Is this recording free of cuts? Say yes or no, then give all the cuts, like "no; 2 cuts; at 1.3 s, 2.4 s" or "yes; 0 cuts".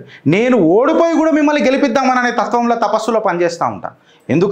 yes; 0 cuts